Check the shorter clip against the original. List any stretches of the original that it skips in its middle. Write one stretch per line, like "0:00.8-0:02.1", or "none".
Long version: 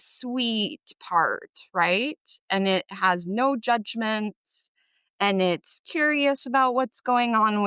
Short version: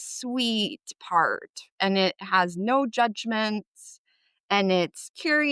0:01.6-0:02.3